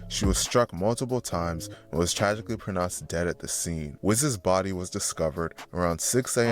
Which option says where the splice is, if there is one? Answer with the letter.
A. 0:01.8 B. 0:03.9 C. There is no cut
B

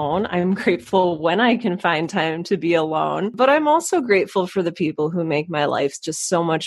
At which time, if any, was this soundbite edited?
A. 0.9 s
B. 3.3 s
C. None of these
B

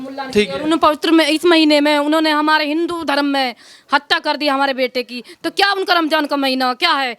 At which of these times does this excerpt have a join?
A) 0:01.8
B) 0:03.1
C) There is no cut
C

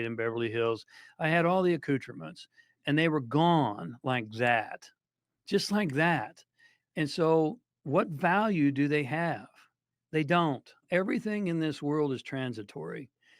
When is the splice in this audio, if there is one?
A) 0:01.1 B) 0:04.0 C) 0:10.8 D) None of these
C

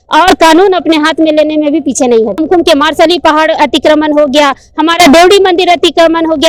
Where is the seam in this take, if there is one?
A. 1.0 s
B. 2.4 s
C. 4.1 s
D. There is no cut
B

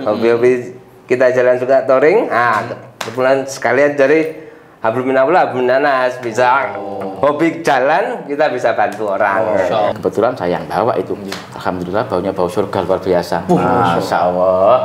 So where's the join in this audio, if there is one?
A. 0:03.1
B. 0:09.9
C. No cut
B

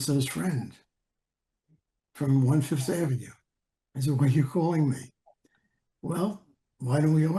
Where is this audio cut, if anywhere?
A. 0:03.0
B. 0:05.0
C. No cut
C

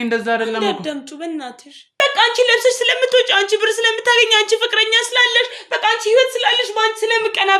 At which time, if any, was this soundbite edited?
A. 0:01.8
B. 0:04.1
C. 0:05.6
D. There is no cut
A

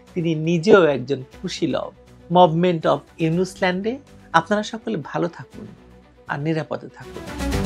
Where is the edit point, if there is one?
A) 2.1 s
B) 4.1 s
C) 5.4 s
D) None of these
D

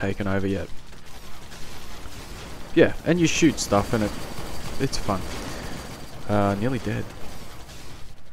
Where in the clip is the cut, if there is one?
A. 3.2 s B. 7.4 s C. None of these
C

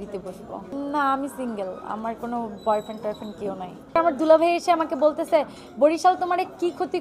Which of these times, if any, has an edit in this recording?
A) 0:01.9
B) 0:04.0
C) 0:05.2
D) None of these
B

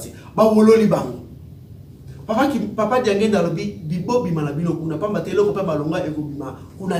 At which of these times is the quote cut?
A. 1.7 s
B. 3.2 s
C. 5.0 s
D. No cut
D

